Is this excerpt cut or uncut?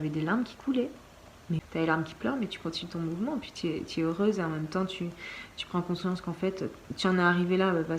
cut